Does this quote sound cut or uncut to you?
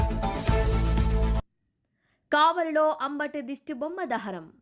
uncut